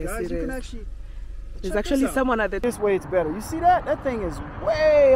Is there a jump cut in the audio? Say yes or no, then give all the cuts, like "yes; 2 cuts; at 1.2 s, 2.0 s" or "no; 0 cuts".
yes; 1 cut; at 2.6 s